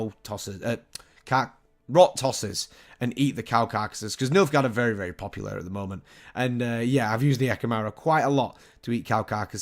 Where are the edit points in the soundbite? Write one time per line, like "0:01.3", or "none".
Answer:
0:01.6